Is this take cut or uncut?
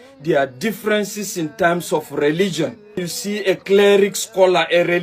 cut